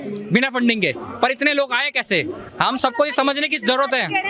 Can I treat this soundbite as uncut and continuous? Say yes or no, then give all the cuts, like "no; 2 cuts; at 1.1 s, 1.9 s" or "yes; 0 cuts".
yes; 0 cuts